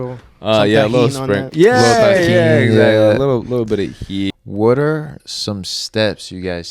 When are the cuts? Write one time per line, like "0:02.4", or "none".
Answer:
0:04.3